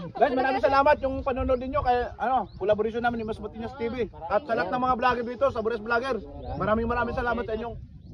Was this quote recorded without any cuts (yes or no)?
yes